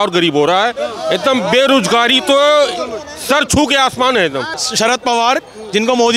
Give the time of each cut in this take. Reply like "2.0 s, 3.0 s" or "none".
4.6 s

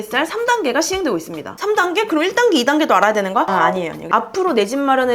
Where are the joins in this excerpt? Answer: 4.1 s

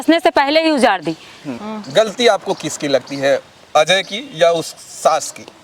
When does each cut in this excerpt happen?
none

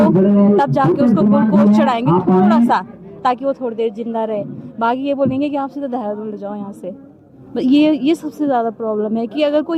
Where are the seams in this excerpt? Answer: none

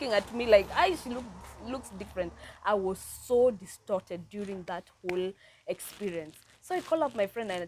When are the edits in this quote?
none

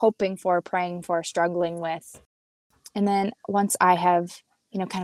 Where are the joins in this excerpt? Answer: 2.5 s

